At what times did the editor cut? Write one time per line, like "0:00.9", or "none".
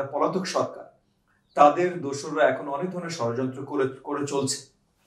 none